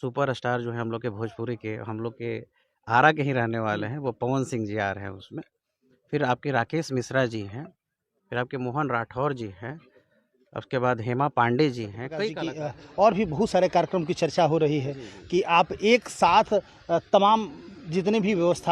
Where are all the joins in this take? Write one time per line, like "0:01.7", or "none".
0:12.4